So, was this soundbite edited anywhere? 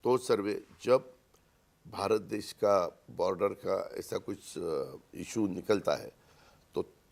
no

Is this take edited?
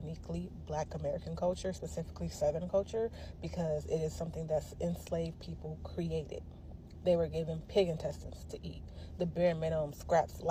no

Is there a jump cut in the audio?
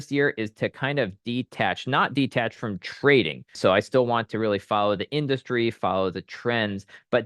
yes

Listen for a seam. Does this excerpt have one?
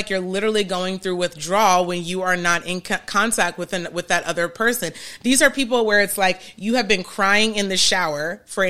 no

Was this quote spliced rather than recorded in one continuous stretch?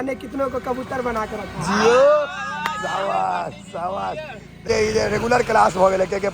yes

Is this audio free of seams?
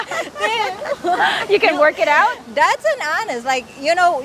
yes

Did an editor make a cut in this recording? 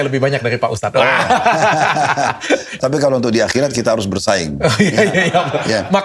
yes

